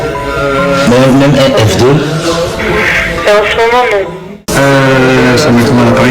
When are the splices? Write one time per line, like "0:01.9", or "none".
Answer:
0:04.5